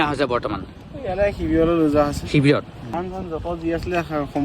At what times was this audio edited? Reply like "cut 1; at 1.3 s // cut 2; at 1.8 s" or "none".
cut 1; at 3.0 s